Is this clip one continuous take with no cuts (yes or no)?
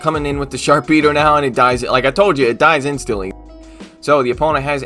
no